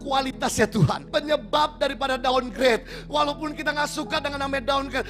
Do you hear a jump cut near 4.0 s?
no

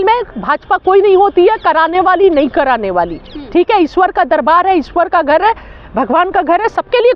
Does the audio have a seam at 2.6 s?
no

